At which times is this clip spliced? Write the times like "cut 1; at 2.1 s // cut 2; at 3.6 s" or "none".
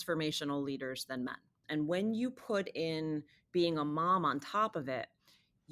cut 1; at 1.6 s